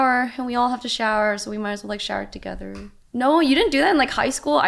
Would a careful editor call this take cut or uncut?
cut